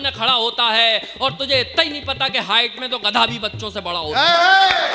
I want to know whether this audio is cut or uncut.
uncut